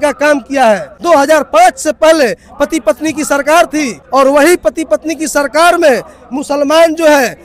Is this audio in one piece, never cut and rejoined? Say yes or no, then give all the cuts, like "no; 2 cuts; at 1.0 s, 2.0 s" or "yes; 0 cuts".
no; 2 cuts; at 0.9 s, 4.0 s